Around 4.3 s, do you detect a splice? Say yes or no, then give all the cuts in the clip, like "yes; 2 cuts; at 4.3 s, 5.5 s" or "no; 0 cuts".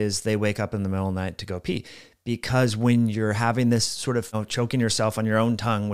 yes; 1 cut; at 4.3 s